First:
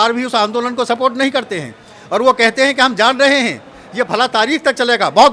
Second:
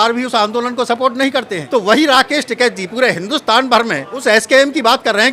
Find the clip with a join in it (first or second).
second